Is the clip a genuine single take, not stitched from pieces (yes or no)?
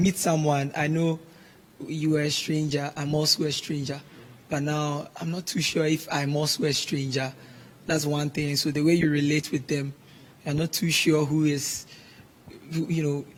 yes